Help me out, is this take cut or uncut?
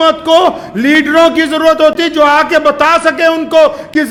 uncut